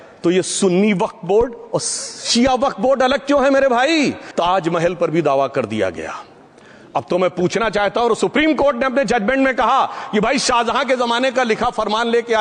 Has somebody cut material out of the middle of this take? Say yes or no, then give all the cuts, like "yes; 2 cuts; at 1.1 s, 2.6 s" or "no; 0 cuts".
yes; 1 cut; at 4.2 s